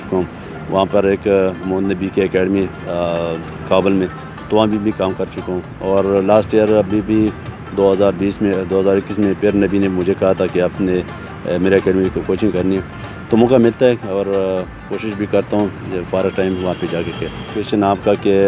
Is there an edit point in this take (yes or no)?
yes